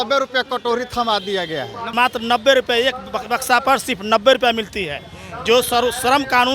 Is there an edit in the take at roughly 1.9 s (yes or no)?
yes